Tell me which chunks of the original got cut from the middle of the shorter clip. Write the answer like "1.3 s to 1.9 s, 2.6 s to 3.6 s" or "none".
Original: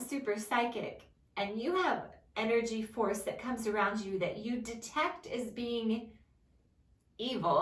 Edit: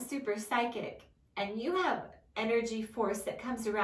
none